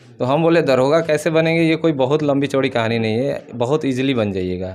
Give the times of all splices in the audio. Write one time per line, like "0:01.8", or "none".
none